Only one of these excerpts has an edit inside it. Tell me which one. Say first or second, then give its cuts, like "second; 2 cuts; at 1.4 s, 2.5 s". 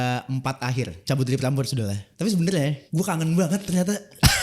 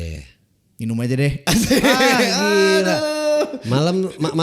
first; 3 cuts; at 1.0 s, 2.0 s, 2.8 s